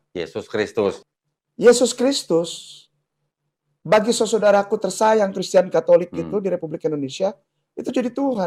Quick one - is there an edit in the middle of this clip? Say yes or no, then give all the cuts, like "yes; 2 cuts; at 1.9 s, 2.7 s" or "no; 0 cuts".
yes; 1 cut; at 1.0 s